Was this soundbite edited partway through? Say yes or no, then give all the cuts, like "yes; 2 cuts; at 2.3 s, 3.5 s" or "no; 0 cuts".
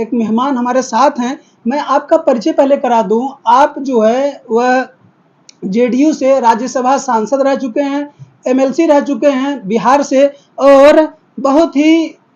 no; 0 cuts